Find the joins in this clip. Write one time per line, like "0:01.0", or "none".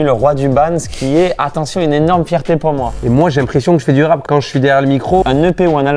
0:03.0
0:04.2
0:05.2